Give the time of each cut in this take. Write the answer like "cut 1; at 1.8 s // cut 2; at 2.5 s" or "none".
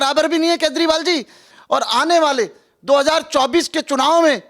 cut 1; at 1.5 s